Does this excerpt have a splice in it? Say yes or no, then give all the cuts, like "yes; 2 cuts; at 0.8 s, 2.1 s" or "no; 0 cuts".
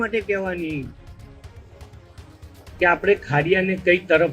no; 0 cuts